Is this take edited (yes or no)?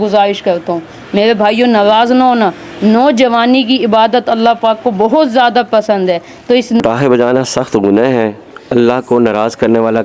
yes